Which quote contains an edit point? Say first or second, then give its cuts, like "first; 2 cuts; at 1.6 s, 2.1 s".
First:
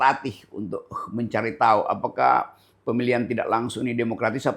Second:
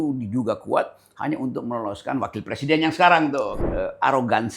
second; 1 cut; at 3.6 s